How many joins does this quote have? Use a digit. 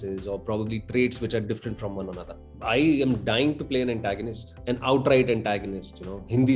1